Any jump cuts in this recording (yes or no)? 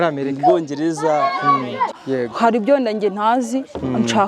yes